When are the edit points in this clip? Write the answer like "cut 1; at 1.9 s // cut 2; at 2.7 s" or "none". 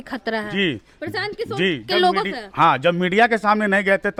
none